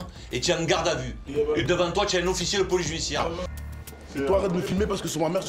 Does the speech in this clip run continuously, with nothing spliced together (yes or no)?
no